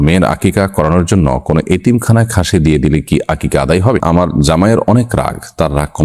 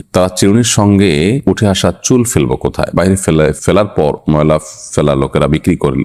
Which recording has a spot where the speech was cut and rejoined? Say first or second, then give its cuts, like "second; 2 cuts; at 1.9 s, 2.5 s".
first; 1 cut; at 4.0 s